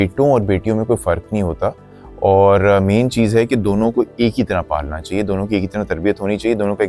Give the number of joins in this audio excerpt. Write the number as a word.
zero